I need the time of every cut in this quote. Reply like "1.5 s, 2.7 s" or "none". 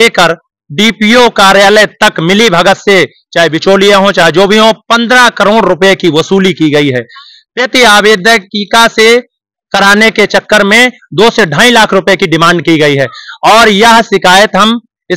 none